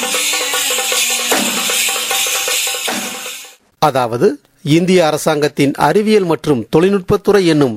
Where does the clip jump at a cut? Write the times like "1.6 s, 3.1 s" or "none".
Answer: 3.6 s